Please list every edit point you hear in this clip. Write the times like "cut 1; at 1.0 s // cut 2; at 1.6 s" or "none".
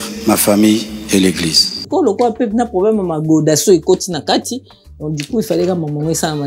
cut 1; at 1.8 s